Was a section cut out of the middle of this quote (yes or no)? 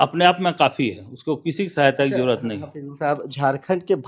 no